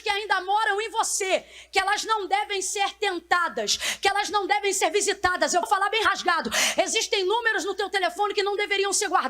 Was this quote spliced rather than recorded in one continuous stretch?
no; 0 cuts

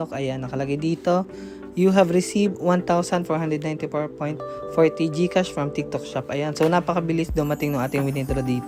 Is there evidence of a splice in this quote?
no; 0 cuts

